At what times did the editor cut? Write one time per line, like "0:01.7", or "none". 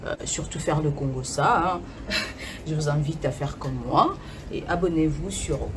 none